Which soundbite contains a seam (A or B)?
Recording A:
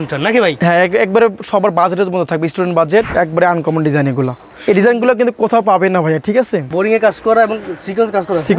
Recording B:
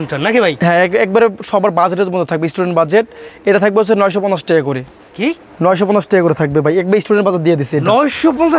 A